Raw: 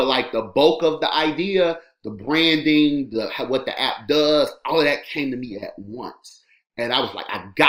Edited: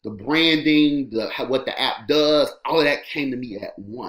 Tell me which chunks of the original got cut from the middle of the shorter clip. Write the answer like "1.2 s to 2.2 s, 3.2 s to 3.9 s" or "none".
none